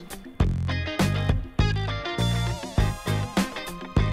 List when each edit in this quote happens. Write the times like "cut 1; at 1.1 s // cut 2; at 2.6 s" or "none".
cut 1; at 1.5 s